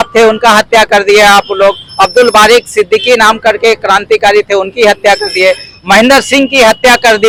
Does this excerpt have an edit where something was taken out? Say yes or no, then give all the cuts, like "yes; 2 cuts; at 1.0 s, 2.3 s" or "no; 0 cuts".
no; 0 cuts